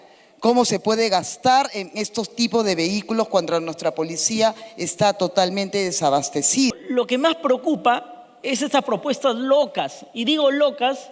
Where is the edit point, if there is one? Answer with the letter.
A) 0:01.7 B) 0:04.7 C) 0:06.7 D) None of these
C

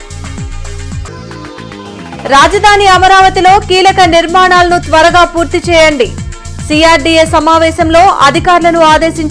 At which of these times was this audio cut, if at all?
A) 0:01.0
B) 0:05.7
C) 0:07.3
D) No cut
A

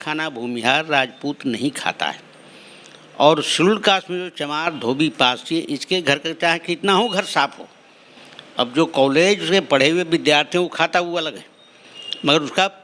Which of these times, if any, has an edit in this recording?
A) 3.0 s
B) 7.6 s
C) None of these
C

